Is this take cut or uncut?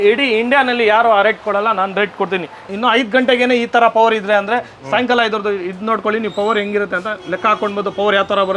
cut